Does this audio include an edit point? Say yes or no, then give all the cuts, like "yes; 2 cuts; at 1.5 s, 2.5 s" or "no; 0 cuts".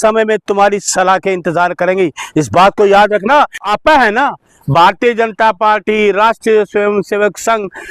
yes; 1 cut; at 3.6 s